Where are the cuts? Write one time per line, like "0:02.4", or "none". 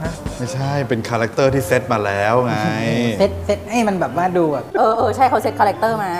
none